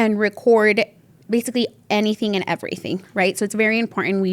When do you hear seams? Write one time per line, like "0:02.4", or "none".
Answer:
0:03.0